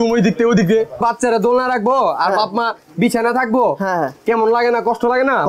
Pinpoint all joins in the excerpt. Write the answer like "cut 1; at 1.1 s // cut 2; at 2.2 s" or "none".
cut 1; at 1.0 s